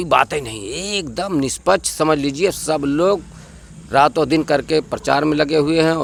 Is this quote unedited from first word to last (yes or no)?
yes